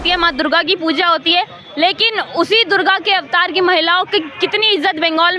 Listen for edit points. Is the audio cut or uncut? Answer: uncut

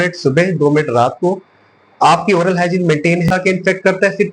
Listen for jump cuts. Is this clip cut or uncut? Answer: cut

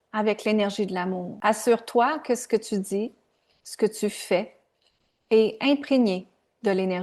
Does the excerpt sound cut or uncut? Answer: cut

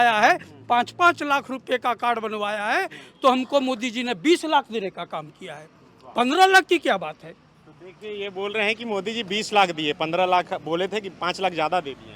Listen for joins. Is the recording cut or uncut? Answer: uncut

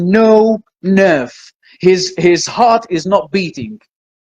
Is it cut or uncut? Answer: uncut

